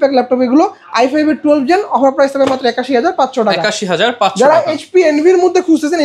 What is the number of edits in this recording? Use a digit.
0